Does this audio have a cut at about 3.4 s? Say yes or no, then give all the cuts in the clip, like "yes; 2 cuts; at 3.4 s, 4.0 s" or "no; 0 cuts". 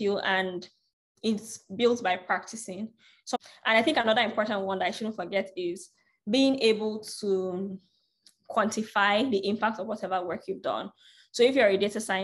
yes; 1 cut; at 3.4 s